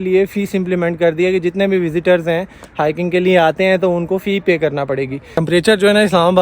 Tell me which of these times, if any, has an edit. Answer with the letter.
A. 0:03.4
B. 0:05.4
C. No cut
B